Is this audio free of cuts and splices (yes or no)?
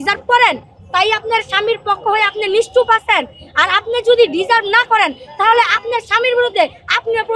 yes